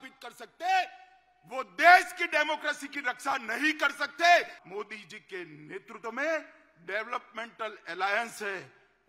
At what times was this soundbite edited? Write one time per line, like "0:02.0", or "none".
0:04.6